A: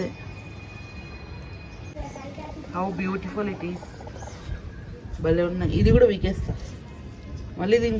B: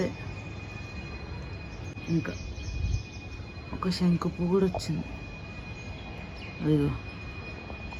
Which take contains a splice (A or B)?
A